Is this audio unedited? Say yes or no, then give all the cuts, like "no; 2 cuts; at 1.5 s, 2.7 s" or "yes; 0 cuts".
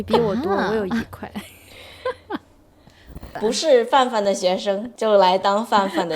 no; 2 cuts; at 3.3 s, 4.9 s